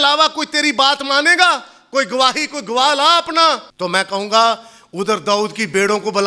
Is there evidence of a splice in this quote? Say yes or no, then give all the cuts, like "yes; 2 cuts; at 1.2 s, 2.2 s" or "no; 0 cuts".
yes; 1 cut; at 3.7 s